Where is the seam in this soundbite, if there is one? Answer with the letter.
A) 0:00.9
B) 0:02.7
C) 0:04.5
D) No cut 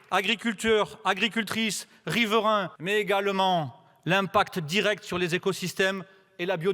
B